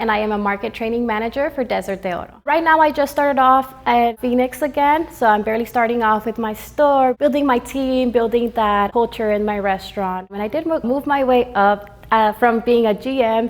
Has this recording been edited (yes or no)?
yes